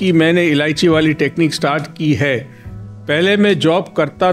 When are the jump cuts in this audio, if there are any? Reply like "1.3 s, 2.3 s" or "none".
none